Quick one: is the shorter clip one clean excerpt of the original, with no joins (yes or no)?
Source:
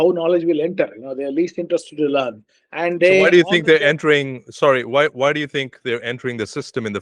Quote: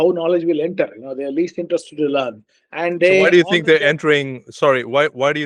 yes